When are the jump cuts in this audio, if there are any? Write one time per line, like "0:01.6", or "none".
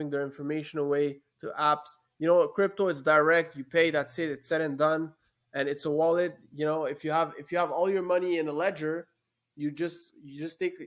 none